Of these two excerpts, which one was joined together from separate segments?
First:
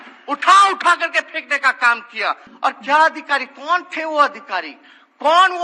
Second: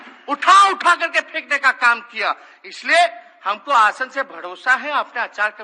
first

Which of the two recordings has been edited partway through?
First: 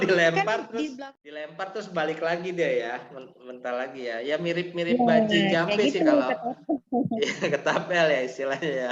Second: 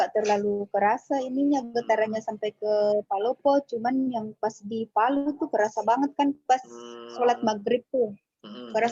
first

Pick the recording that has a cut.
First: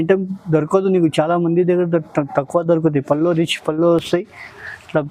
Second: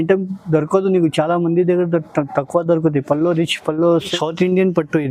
second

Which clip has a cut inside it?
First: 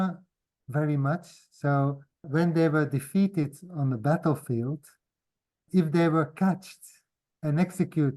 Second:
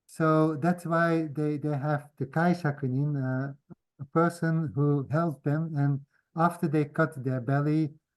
first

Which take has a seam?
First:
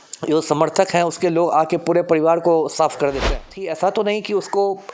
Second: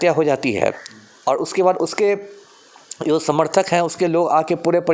first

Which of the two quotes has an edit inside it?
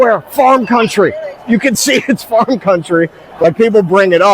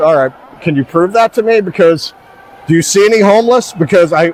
first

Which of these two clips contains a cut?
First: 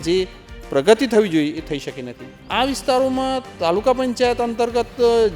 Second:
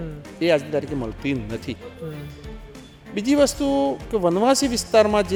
first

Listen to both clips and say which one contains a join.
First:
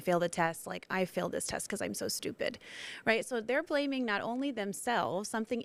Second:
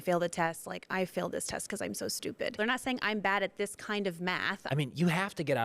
second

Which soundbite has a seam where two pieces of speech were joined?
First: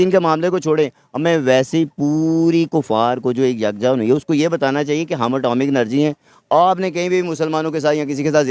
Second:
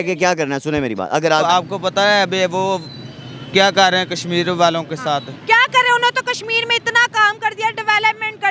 second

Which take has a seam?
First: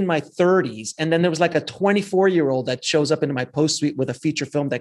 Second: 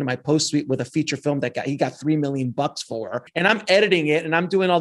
second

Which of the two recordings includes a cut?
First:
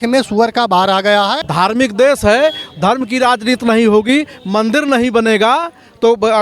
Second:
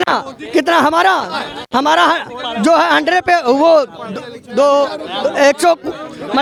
first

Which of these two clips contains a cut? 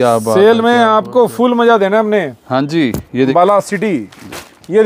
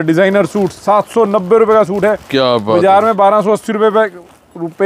first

